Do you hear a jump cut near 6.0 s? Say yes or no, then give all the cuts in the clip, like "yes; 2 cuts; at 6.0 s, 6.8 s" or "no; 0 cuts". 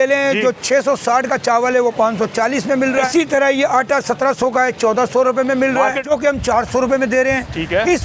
yes; 2 cuts; at 3.1 s, 6.0 s